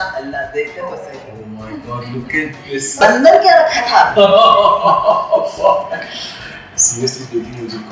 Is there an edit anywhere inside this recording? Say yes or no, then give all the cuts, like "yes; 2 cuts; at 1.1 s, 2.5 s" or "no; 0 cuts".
yes; 1 cut; at 2.9 s